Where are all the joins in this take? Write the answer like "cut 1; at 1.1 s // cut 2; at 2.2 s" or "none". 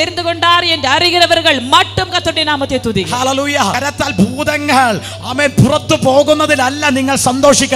cut 1; at 3.8 s